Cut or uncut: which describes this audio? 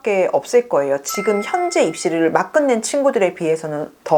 uncut